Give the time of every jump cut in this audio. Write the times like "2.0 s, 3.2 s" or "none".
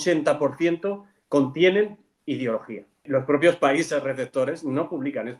3.0 s